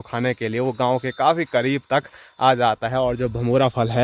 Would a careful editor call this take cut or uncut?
uncut